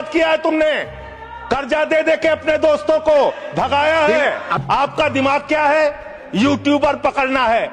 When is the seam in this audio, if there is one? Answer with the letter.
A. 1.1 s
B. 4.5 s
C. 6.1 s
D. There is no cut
B